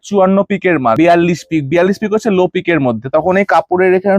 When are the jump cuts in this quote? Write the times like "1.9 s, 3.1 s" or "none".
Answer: 1.0 s